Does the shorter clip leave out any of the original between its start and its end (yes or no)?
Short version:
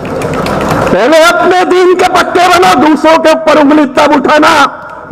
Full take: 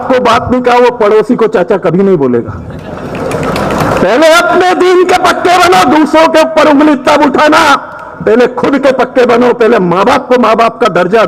no